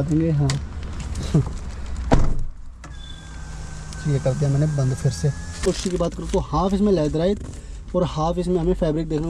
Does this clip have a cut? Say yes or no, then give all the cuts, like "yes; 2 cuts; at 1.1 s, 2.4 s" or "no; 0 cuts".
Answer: yes; 1 cut; at 5.7 s